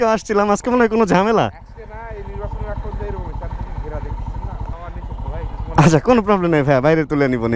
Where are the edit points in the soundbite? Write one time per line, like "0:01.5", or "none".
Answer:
0:04.5